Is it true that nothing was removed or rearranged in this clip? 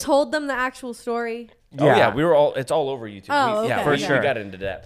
yes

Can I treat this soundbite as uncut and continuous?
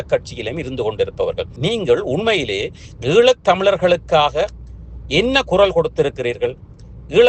no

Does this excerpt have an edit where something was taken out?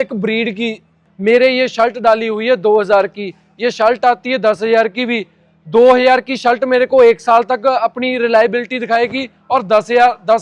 yes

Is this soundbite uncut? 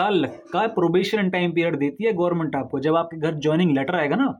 yes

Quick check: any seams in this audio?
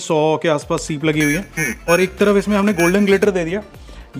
no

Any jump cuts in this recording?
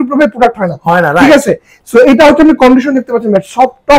no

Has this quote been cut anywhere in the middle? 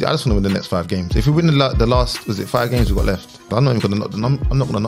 yes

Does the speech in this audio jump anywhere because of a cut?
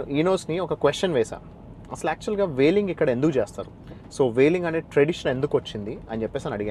no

